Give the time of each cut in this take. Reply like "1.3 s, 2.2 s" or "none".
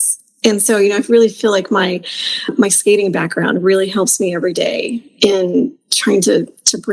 none